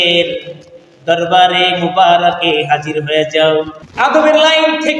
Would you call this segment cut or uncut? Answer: cut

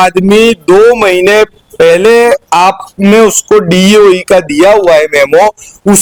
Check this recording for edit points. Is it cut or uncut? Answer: uncut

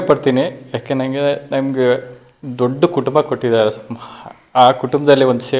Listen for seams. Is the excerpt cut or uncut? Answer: uncut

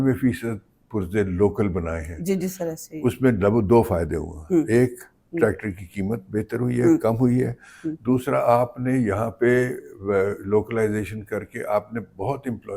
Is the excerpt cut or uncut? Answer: uncut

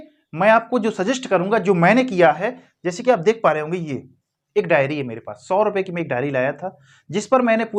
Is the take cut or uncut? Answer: uncut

